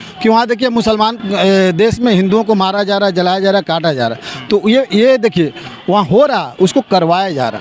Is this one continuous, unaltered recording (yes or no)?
yes